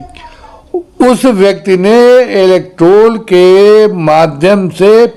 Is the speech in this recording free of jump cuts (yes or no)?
yes